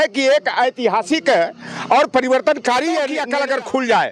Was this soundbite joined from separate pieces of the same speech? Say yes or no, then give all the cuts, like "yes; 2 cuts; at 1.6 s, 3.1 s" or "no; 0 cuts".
yes; 1 cut; at 3.2 s